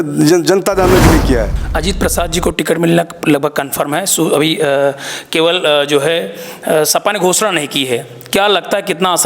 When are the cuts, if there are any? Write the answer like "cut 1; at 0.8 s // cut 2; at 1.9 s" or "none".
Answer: cut 1; at 1.5 s